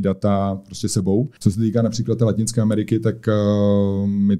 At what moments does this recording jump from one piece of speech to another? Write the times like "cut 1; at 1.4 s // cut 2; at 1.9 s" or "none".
cut 1; at 1.3 s